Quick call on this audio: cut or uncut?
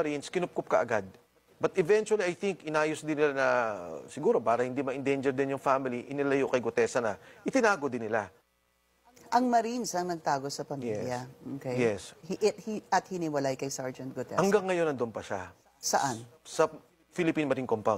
uncut